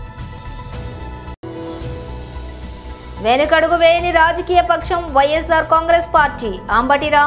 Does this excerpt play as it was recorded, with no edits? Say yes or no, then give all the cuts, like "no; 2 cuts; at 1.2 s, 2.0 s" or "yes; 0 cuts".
no; 1 cut; at 2.9 s